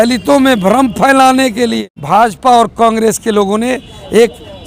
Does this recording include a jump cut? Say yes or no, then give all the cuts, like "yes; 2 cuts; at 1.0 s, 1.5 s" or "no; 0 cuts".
yes; 1 cut; at 1.9 s